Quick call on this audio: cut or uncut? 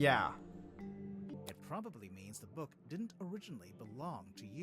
cut